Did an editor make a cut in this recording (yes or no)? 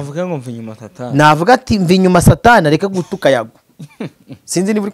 no